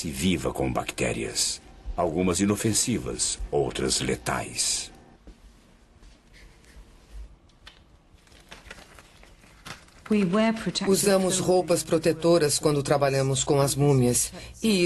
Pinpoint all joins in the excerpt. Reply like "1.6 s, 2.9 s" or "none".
10.9 s